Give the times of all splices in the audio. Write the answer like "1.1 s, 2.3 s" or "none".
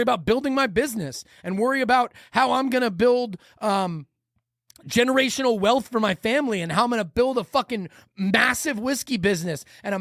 none